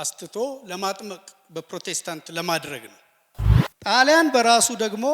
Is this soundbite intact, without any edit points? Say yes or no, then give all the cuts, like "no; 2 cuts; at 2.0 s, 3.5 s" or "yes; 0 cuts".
no; 1 cut; at 3.6 s